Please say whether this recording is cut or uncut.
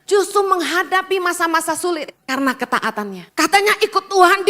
cut